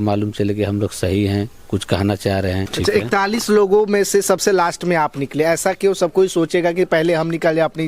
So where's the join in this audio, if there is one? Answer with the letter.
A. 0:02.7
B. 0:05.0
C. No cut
A